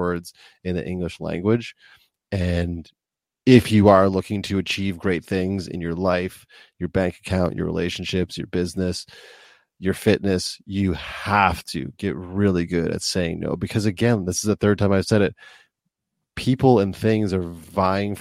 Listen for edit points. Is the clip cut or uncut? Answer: uncut